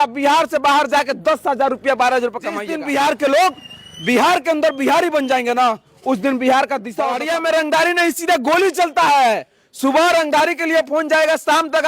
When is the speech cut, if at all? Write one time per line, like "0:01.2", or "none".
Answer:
0:02.7
0:07.1